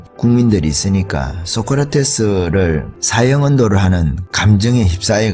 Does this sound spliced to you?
yes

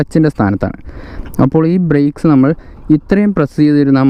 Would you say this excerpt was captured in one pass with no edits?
yes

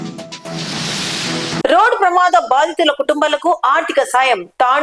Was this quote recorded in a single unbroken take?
no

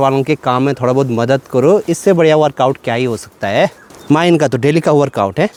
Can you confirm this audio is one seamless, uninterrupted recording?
yes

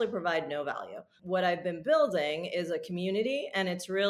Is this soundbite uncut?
no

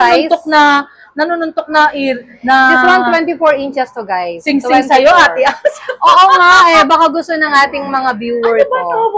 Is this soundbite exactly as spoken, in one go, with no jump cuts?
yes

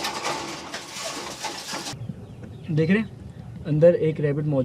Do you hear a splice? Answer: yes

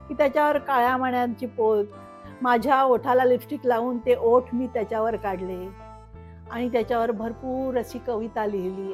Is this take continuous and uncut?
yes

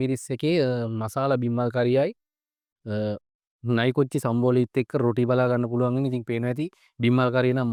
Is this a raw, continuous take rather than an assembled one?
yes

